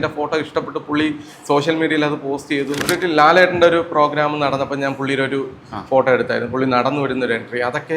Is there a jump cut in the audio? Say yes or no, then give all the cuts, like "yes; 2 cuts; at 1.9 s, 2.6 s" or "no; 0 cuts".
yes; 1 cut; at 2.8 s